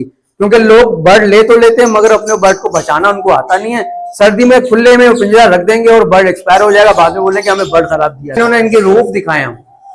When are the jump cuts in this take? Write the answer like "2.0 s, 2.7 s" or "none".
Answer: 8.4 s